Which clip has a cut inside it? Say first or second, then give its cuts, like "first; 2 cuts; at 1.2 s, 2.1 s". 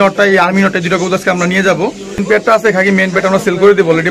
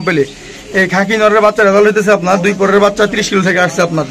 first; 1 cut; at 2.2 s